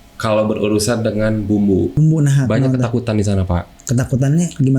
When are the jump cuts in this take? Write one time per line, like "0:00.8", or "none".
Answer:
0:01.9

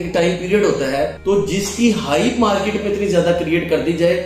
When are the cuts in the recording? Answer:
0:01.2

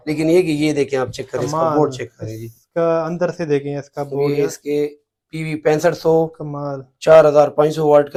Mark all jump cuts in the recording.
none

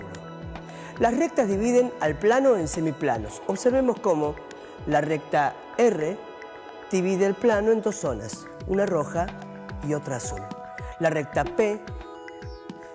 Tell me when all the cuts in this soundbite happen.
0:10.2

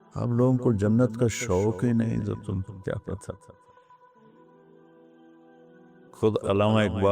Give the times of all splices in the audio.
0:03.5
0:06.2

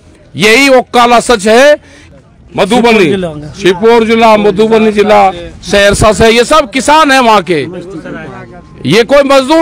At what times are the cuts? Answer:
0:02.0

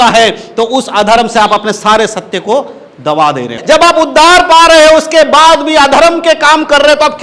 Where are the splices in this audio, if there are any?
0:03.6

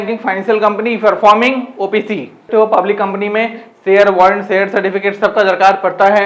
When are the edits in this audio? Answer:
0:02.5

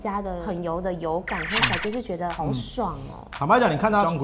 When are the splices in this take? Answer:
none

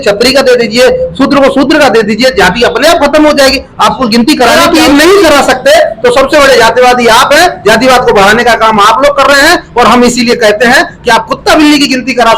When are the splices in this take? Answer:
0:04.5

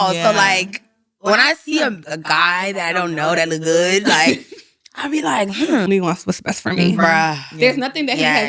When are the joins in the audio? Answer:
0:05.9

